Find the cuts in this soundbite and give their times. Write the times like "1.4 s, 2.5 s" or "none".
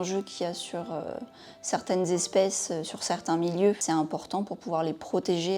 3.8 s